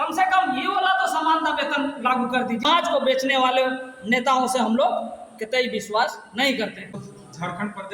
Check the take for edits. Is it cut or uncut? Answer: cut